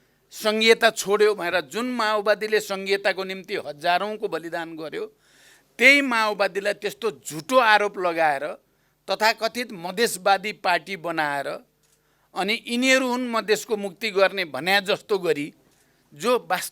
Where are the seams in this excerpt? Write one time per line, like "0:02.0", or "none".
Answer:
none